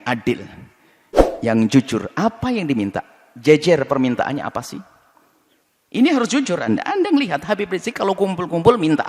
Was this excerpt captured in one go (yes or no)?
yes